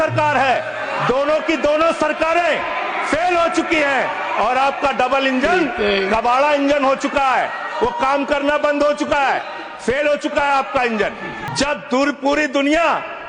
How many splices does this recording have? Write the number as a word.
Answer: one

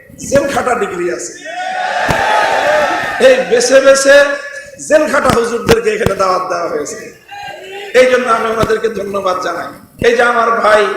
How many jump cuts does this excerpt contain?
one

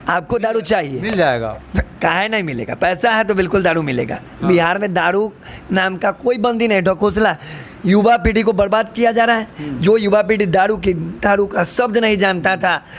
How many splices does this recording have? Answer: zero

